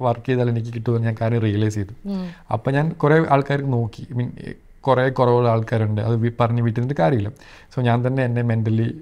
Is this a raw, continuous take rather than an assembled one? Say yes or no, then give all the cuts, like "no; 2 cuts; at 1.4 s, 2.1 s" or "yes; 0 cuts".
yes; 0 cuts